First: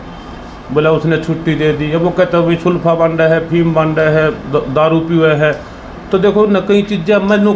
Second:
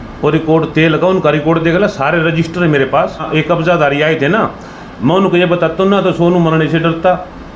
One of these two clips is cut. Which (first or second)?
second